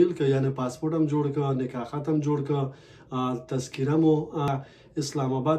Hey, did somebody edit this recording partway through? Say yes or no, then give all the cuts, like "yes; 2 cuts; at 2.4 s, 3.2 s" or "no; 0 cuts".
yes; 1 cut; at 4.5 s